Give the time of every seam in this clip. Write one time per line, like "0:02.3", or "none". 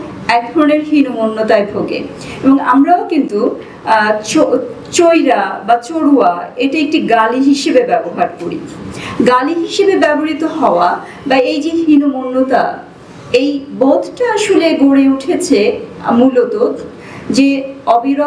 none